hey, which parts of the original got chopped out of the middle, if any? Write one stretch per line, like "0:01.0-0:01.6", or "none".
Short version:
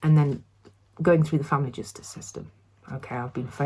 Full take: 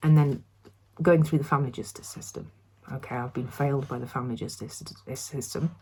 none